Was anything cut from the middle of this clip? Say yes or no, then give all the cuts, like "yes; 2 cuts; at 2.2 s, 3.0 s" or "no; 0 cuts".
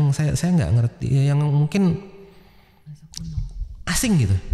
no; 0 cuts